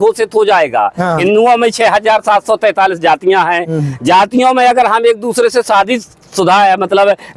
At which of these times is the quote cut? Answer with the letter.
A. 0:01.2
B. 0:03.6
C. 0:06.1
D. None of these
A